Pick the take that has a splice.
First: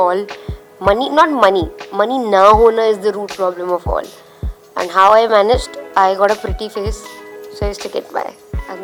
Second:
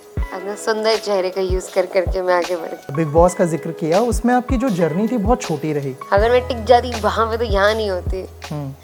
second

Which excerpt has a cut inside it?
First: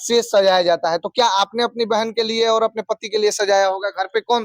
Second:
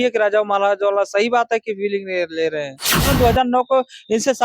second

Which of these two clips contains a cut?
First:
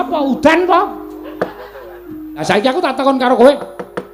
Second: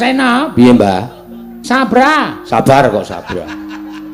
first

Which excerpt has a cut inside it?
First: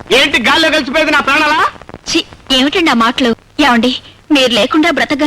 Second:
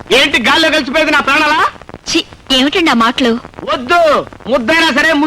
first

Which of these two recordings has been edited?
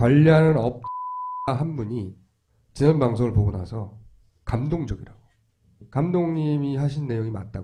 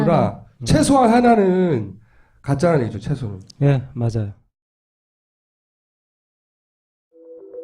second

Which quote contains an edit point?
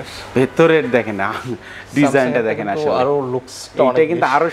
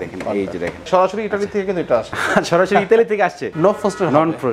second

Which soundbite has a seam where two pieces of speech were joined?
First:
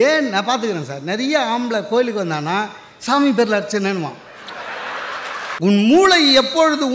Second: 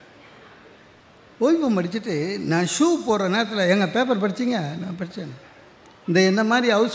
first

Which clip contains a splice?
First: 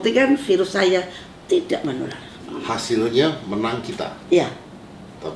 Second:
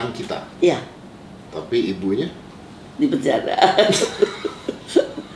first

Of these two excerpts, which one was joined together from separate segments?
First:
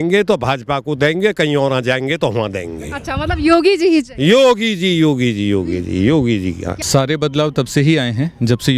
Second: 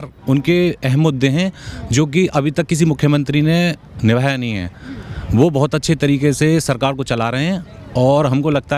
first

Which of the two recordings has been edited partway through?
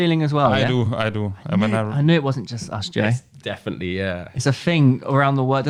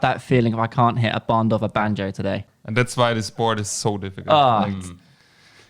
second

